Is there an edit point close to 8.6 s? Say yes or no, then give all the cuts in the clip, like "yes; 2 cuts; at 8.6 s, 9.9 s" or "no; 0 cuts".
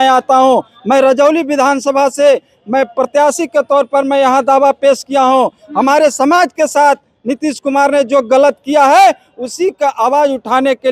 no; 0 cuts